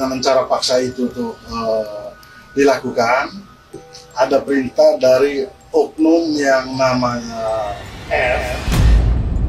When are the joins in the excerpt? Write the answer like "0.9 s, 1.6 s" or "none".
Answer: none